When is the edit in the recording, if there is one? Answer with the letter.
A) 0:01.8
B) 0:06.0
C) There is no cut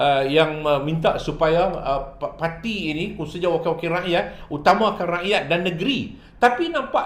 C